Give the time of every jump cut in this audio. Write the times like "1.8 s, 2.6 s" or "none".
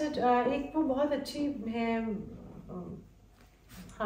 none